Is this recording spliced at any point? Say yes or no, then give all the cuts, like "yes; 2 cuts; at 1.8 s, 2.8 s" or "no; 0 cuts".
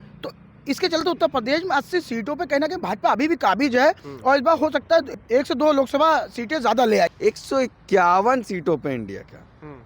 yes; 2 cuts; at 5.2 s, 7.1 s